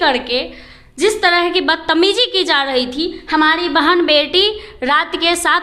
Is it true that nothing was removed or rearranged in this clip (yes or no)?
yes